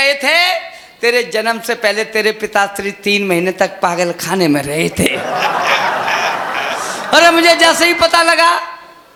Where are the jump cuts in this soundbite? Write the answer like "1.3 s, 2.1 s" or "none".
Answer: none